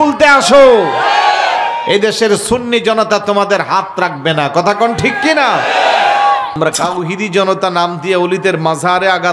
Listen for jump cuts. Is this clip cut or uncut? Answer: cut